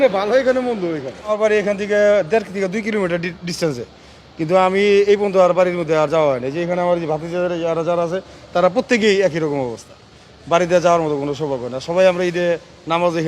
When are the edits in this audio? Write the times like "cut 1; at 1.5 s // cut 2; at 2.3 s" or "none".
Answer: cut 1; at 1.3 s